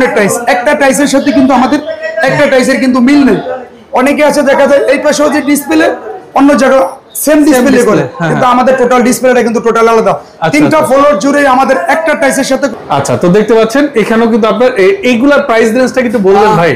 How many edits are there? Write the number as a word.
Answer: zero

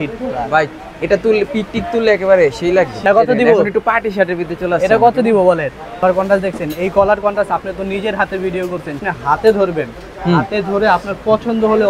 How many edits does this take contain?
three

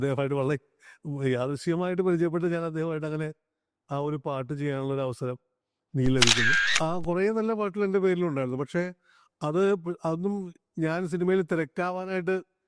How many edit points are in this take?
one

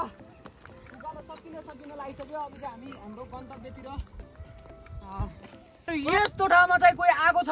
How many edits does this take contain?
one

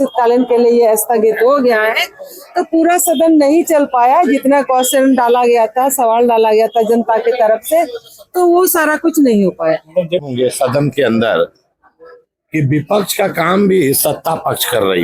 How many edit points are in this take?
one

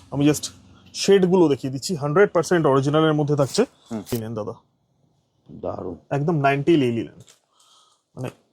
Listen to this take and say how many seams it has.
one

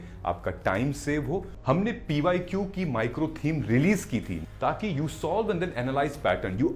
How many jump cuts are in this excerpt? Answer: two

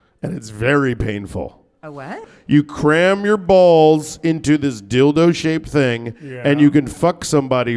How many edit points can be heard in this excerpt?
one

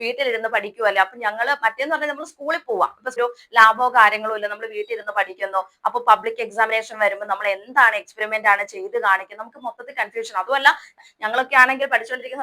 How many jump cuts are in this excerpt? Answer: two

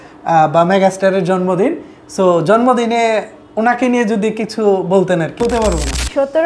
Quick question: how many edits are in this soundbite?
one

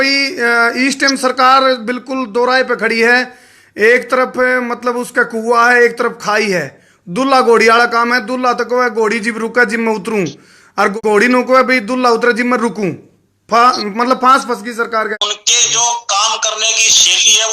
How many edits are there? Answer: two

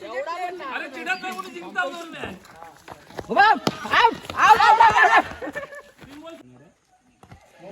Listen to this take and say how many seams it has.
one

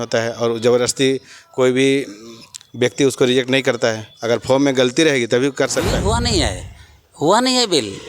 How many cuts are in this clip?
one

